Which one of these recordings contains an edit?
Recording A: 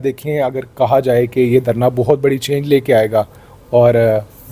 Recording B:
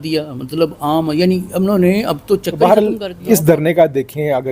B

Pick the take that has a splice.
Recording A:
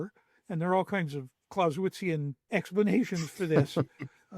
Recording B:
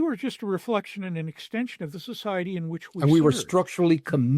A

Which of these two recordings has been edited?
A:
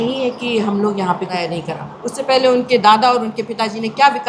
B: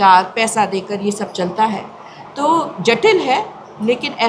A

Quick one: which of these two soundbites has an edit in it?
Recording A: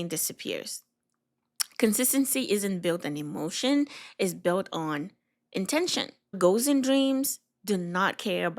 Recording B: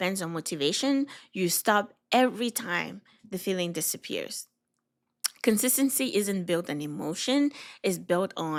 A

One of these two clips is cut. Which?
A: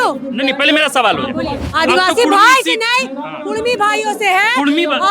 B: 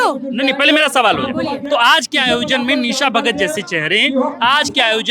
A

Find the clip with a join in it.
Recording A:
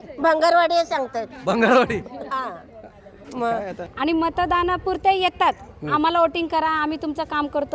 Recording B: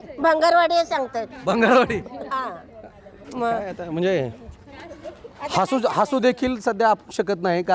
A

